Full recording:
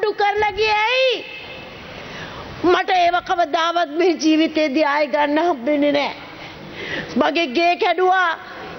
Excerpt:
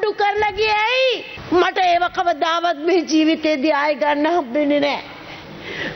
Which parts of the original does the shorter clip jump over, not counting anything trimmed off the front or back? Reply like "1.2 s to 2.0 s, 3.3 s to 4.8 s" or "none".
1.3 s to 2.4 s

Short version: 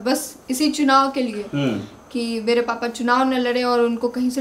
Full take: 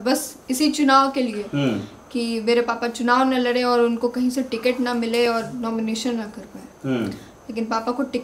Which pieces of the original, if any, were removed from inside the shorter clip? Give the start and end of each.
none

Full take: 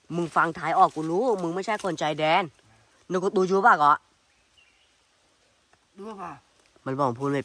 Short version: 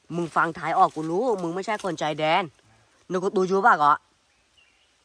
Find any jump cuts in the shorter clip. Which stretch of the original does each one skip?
none

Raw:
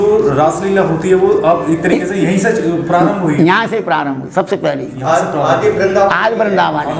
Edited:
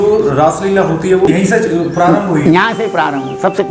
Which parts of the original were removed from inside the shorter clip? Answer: 1.3 s to 2.2 s

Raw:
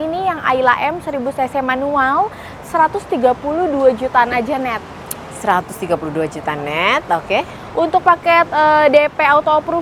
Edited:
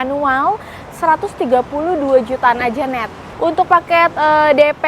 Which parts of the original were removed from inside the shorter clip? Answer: 4.9 s to 7.6 s

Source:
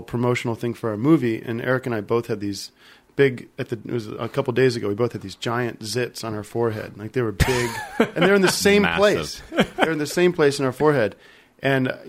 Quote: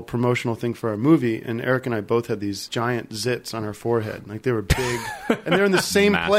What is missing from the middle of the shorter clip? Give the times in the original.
2.6 s to 5.3 s

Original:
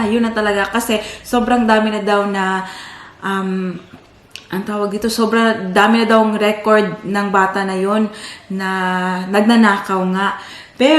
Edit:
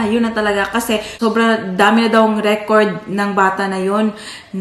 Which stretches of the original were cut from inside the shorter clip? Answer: 1.2 s to 5.1 s

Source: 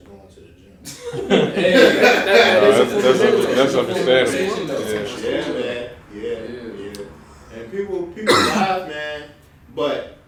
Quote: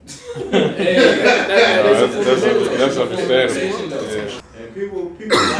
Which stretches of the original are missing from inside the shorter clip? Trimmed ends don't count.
5.1 s to 7.3 s

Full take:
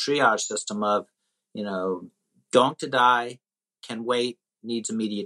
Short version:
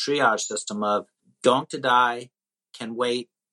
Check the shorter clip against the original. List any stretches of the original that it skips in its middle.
1.2 s to 2.3 s

